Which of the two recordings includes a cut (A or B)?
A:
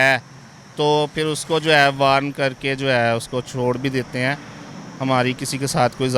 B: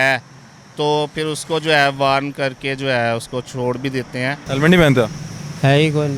B